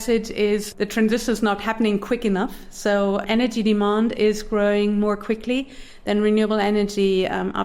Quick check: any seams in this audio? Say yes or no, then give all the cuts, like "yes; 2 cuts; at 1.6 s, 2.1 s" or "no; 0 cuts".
yes; 1 cut; at 3.2 s